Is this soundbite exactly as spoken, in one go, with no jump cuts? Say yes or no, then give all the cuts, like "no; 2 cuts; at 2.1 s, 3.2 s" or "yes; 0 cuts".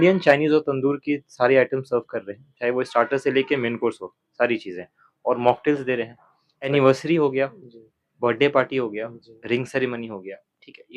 no; 1 cut; at 6.7 s